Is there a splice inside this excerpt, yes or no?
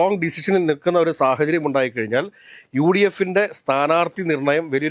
no